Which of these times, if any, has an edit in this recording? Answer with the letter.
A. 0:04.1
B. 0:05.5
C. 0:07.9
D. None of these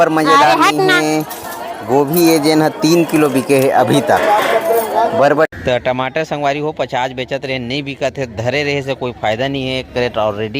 B